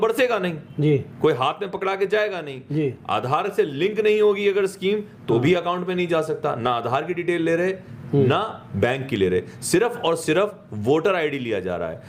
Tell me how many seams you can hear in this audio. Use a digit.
0